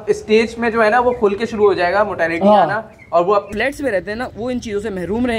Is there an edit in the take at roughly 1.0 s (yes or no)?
no